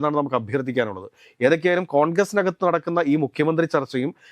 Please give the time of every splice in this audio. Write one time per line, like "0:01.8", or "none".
none